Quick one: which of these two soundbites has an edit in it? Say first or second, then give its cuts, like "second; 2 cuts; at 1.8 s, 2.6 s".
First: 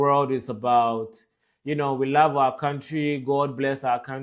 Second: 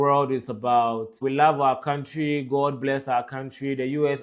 second; 1 cut; at 1.2 s